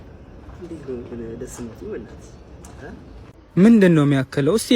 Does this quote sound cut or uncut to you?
cut